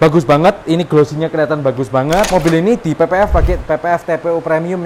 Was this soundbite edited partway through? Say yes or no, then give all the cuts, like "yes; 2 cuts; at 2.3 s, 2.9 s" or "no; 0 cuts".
yes; 1 cut; at 2.3 s